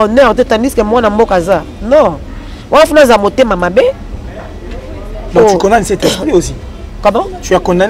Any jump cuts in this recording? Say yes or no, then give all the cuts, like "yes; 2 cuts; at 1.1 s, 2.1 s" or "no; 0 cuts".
no; 0 cuts